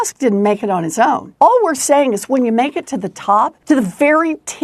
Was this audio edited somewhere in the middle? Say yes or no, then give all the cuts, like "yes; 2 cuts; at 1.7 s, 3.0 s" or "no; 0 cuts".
yes; 2 cuts; at 1.3 s, 3.6 s